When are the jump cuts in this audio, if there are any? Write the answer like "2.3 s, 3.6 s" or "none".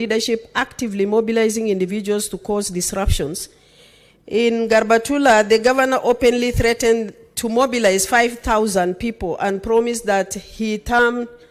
none